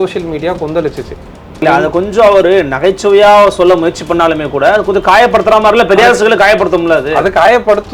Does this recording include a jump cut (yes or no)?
yes